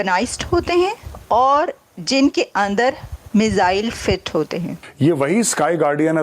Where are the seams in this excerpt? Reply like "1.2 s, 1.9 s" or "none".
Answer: 4.8 s